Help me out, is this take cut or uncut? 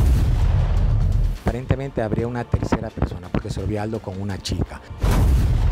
cut